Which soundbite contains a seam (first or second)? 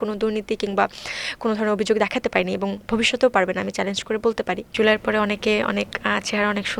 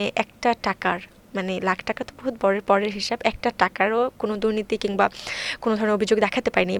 first